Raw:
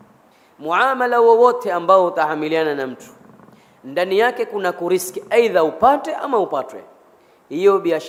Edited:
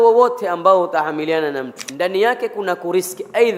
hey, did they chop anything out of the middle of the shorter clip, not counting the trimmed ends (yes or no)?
yes